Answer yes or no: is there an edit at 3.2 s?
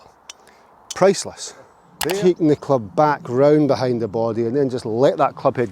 no